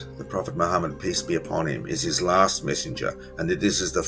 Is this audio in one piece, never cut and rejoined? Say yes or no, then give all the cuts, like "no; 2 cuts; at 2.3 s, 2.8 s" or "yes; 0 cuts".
yes; 0 cuts